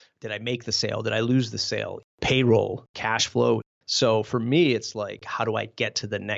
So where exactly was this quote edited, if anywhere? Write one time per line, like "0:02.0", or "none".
0:02.1
0:02.9
0:03.8
0:05.3